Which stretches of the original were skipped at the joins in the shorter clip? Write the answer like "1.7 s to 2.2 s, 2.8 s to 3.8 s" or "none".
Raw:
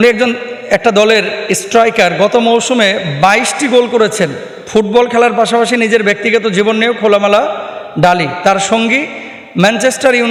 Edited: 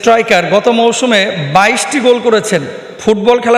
none